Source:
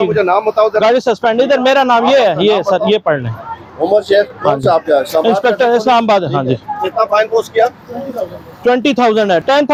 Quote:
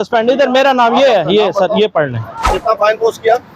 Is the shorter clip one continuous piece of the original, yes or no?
no